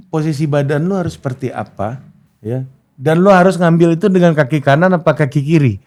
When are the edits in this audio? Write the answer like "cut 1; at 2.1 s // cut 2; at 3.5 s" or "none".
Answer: none

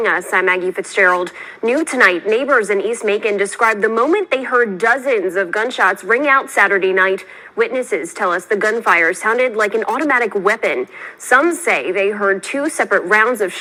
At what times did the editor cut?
none

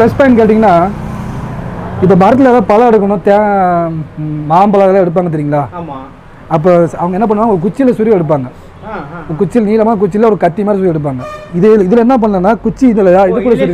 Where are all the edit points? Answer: none

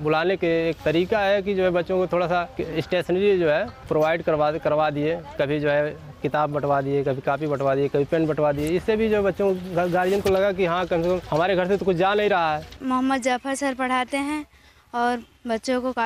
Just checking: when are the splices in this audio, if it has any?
cut 1; at 0.8 s // cut 2; at 2.6 s // cut 3; at 3.8 s // cut 4; at 11.2 s // cut 5; at 12.7 s

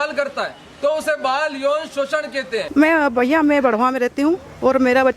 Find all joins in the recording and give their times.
cut 1; at 2.6 s

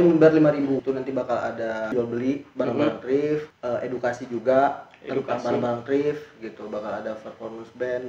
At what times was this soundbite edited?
cut 1; at 0.8 s // cut 2; at 1.9 s // cut 3; at 3.5 s

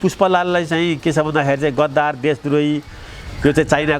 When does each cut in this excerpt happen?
none

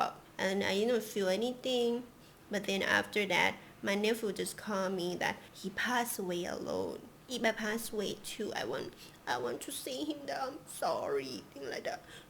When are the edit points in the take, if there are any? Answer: cut 1; at 5.5 s // cut 2; at 7.2 s

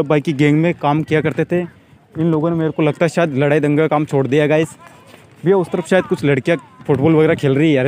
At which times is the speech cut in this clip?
none

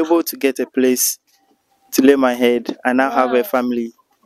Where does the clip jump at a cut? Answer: none

